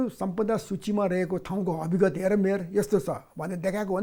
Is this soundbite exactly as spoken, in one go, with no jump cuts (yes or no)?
yes